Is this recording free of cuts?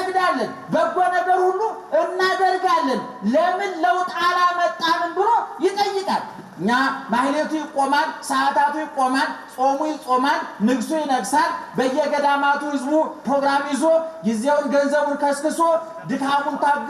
no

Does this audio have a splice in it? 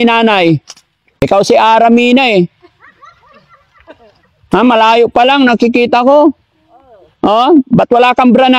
yes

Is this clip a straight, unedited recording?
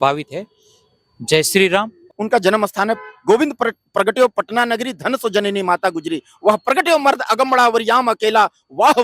no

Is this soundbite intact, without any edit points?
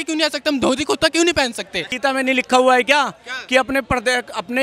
no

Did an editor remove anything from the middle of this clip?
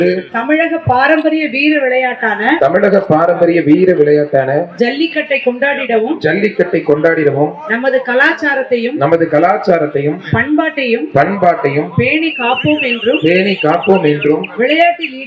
no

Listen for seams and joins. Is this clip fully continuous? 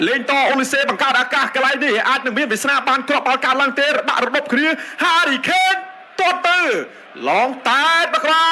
yes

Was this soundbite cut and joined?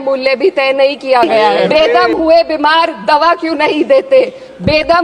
yes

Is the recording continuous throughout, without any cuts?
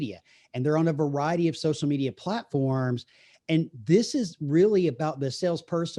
yes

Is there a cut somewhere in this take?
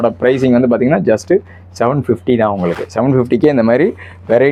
no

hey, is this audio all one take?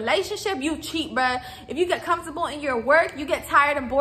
yes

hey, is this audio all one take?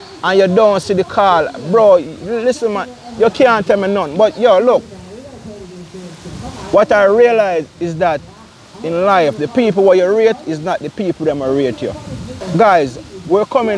no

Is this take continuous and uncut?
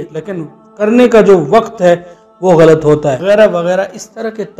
no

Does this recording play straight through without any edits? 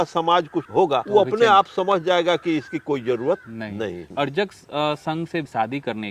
no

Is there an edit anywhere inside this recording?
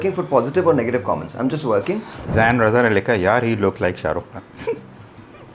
yes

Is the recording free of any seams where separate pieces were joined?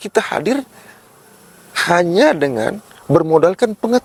yes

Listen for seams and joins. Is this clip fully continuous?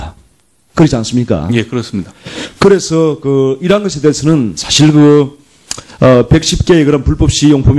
yes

